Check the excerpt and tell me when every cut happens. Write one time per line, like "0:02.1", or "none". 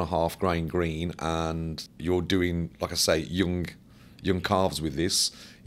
0:01.9